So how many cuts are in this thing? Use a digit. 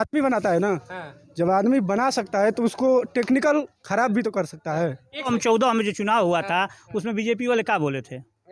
1